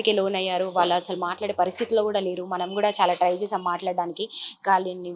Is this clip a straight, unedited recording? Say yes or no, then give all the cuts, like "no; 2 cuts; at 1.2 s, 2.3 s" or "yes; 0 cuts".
yes; 0 cuts